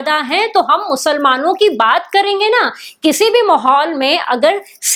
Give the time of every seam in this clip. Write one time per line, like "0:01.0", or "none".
none